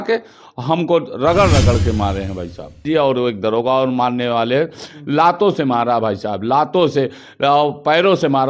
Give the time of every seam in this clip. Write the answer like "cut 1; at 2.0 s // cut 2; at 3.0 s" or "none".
cut 1; at 2.8 s